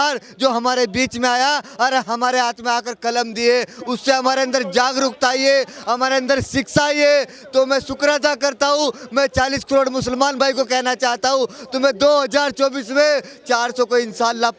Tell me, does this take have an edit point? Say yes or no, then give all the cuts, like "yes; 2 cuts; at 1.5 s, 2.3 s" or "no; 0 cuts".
no; 0 cuts